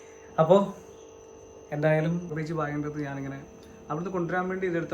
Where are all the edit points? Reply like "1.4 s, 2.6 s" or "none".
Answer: 2.3 s